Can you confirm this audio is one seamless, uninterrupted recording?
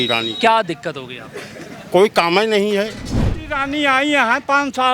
no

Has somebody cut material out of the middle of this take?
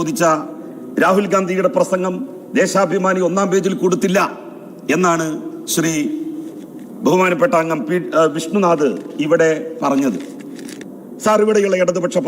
yes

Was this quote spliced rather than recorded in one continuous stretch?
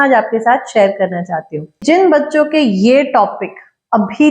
yes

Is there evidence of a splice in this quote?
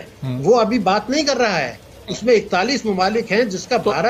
no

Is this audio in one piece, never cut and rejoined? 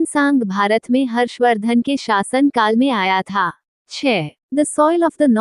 no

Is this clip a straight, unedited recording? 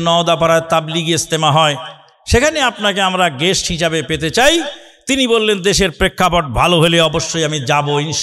yes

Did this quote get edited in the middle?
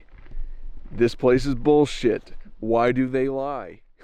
no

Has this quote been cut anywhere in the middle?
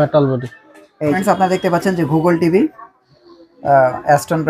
yes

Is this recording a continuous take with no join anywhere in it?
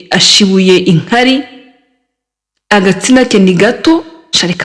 yes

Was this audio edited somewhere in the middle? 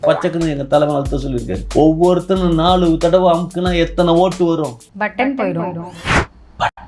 yes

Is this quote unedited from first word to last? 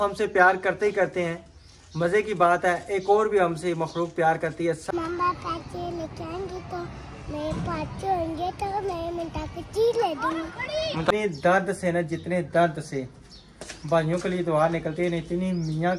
no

